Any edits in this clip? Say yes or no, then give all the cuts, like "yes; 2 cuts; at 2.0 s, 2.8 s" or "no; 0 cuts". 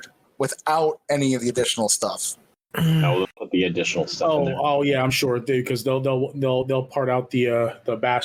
no; 0 cuts